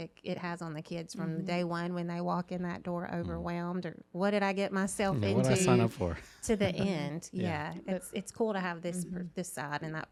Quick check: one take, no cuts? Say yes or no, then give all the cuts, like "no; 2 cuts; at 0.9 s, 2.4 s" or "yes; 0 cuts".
yes; 0 cuts